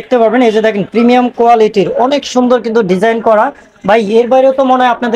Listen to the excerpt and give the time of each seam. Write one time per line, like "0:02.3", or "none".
none

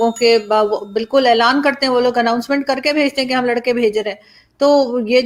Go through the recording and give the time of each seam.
none

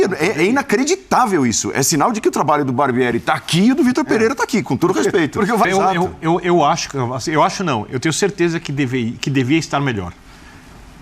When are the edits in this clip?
0:05.7

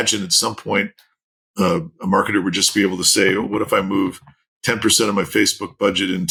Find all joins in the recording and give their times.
none

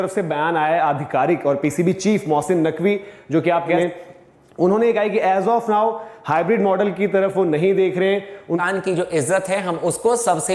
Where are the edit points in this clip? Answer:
0:03.8
0:08.6

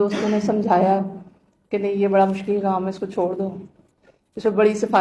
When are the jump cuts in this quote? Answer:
none

